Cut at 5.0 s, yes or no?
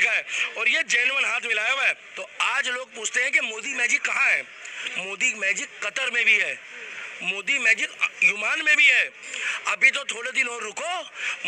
no